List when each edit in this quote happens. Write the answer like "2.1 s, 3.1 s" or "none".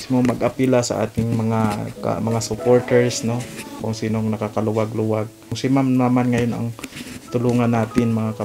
3.8 s, 5.6 s